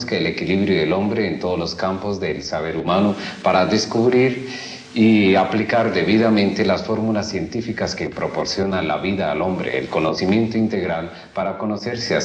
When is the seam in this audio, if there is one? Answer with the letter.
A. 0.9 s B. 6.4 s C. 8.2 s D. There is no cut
B